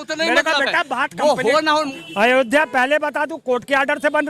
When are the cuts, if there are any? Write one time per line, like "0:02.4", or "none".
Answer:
0:02.0